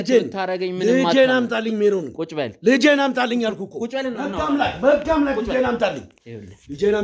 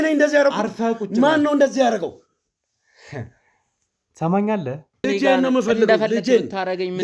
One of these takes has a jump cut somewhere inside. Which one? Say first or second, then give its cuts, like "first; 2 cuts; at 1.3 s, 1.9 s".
second; 1 cut; at 5.1 s